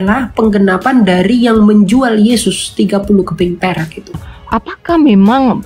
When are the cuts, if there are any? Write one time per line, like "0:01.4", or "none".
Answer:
0:04.3

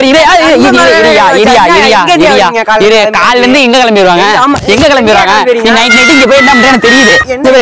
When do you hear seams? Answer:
0:02.5

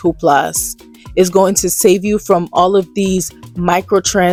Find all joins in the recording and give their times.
none

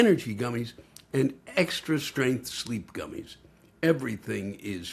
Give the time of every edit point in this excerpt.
none

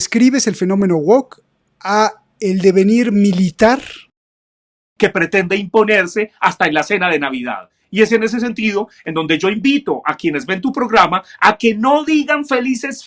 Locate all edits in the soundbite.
0:04.7

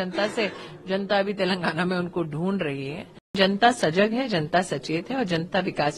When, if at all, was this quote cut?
0:03.4

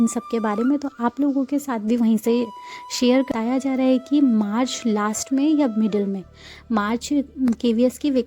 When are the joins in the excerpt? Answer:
0:03.3

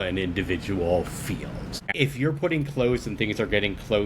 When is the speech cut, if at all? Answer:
0:01.9

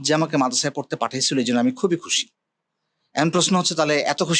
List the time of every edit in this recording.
none

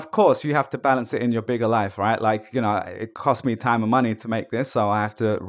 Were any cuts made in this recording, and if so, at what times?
none

